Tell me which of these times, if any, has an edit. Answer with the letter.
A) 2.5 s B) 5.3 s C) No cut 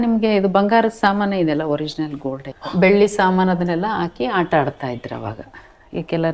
A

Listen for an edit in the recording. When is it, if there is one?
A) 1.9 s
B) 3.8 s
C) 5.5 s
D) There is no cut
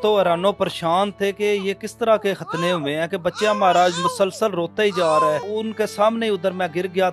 C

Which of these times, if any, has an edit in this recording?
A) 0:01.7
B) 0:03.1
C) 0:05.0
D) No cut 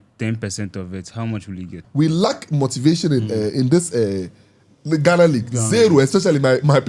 A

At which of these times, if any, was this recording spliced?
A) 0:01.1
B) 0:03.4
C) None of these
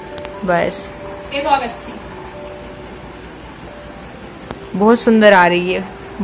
C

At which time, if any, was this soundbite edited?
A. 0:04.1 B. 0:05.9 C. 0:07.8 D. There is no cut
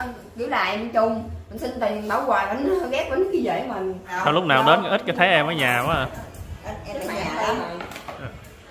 A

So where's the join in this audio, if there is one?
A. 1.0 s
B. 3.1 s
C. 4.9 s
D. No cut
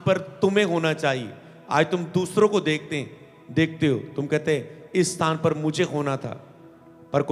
D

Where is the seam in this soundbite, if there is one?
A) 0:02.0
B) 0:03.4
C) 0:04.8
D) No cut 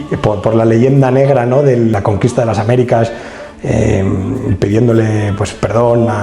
A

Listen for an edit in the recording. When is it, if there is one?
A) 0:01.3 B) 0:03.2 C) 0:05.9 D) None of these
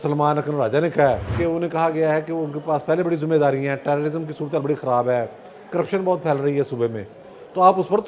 A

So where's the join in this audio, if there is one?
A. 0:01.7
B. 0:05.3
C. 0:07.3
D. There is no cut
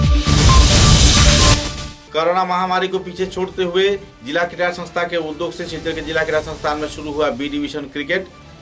D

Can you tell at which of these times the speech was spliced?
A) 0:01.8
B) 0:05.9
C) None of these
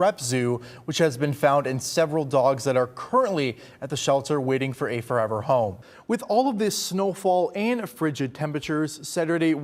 B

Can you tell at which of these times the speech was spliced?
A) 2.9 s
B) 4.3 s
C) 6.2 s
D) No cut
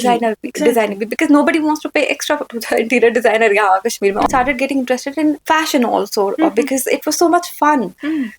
B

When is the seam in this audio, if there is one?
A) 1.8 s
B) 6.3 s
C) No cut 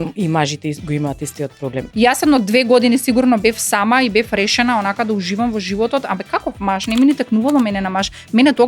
A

